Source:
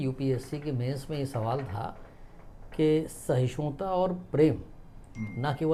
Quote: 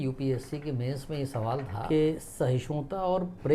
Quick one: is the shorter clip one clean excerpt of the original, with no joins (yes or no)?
no